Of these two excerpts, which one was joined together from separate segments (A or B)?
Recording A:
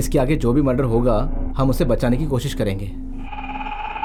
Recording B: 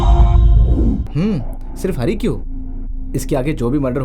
B